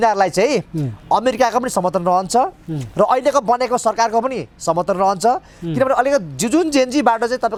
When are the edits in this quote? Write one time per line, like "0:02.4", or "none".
none

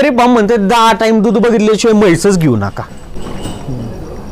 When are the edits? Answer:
none

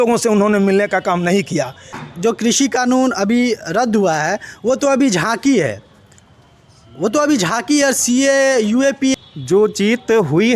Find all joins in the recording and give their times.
0:01.9
0:09.1

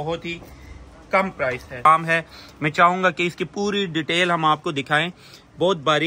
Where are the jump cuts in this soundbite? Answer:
0:01.9

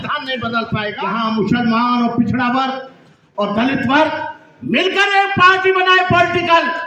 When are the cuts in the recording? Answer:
0:01.0

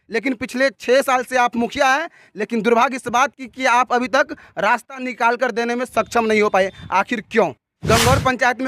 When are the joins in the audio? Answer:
0:07.7

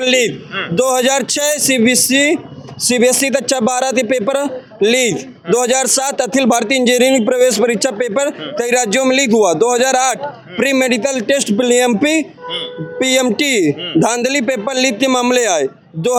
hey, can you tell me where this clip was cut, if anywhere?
none

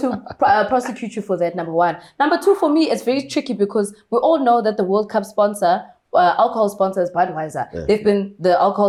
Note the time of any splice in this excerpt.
none

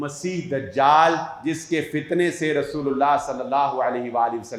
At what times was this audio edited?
none

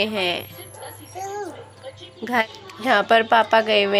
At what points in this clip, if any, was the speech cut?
0:02.4

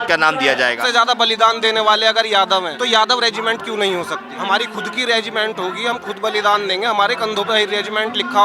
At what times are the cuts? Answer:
0:00.8
0:02.7
0:04.3

